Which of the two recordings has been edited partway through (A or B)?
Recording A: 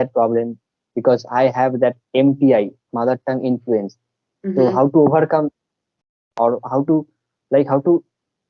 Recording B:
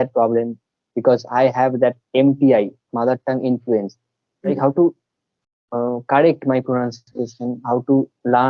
B